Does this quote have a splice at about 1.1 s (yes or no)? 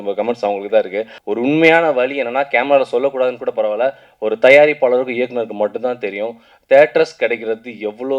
yes